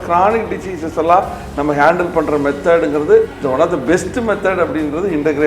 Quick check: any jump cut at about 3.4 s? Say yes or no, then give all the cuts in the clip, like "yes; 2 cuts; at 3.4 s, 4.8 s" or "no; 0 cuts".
yes; 1 cut; at 3.4 s